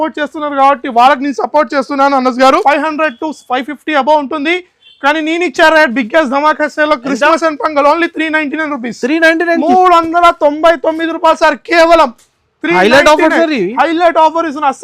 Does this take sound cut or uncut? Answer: cut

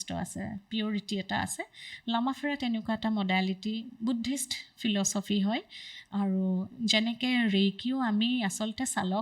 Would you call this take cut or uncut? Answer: uncut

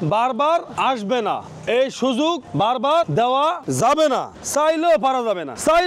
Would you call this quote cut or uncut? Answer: uncut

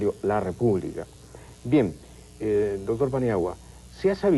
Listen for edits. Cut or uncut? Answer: cut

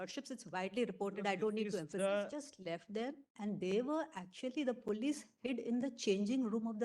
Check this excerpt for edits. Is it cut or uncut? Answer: cut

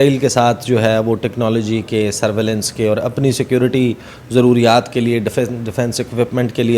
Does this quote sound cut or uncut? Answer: uncut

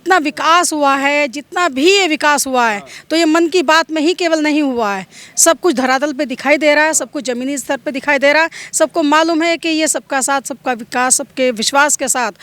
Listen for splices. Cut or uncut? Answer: uncut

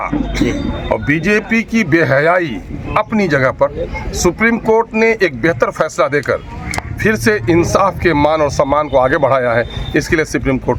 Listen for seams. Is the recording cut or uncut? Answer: uncut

